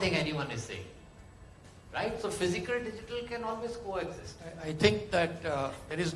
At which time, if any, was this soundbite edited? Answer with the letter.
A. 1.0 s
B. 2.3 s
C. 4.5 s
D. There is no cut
C